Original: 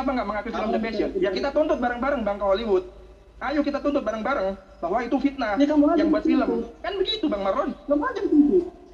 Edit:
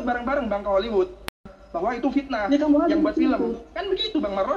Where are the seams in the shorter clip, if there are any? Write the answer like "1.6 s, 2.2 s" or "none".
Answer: 1.6 s